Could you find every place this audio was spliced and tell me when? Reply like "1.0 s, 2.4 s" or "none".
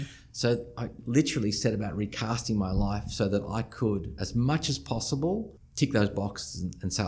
5.6 s

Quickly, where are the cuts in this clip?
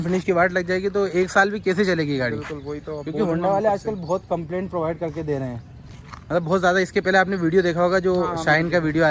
none

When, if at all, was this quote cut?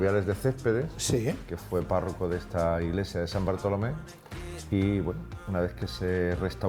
none

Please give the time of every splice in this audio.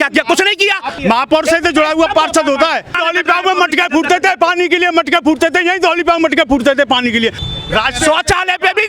0.9 s, 2.9 s, 7.4 s

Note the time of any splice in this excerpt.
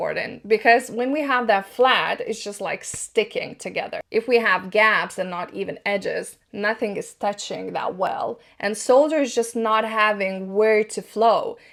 none

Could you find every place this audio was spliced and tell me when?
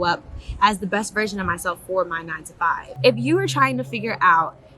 2.9 s

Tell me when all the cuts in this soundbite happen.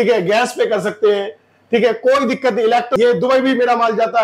2.9 s

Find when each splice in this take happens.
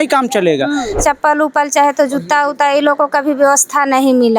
1.0 s

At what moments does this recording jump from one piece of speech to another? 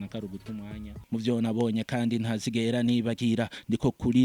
0.9 s

